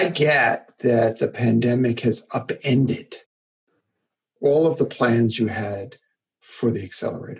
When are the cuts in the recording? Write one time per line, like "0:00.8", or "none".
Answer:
none